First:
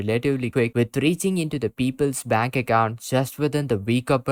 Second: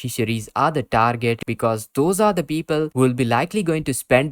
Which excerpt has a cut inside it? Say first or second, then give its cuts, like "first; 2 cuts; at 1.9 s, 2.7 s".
second; 1 cut; at 1.4 s